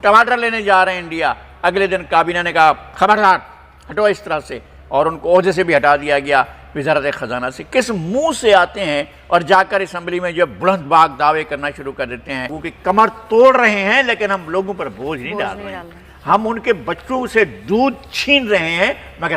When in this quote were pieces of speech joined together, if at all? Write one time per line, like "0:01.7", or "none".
0:12.5

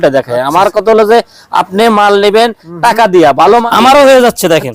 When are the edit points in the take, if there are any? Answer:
0:03.7

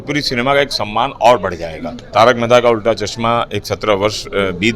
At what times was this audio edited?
0:02.0

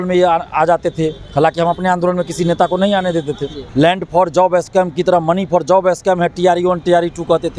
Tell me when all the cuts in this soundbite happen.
0:03.5

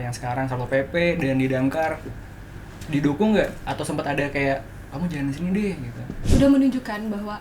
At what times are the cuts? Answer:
0:06.2

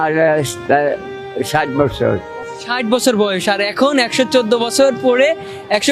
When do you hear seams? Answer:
none

